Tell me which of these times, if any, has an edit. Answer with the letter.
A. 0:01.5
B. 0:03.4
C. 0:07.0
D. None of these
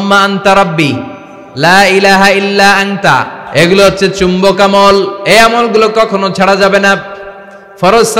B